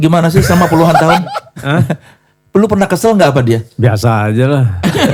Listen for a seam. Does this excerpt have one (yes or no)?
no